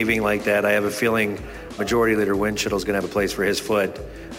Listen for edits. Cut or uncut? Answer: cut